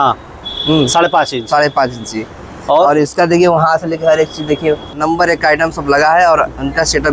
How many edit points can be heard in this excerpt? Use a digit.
1